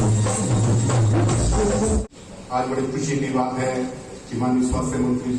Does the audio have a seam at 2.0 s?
yes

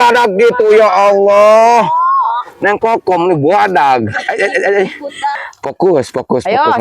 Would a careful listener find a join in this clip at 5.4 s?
yes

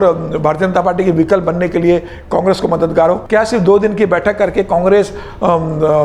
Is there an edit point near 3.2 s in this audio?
yes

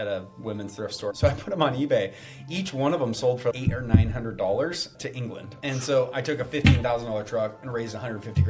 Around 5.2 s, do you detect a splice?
yes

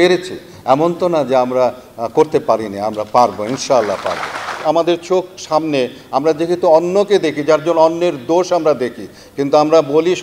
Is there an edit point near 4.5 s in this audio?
yes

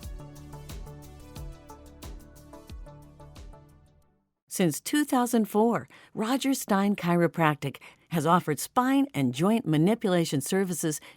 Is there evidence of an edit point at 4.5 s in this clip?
yes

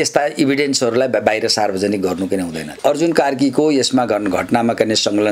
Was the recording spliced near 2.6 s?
yes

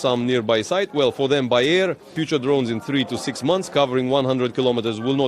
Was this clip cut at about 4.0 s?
no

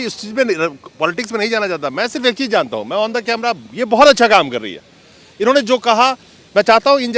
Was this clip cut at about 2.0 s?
no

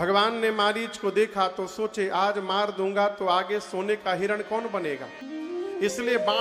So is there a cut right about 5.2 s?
yes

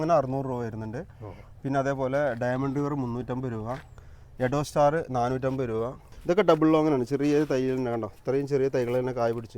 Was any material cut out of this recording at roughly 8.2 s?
no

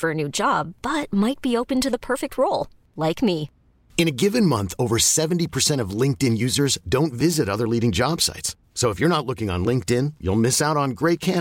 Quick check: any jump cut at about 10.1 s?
no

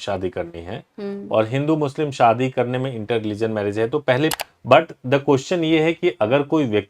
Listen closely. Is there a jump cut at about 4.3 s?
yes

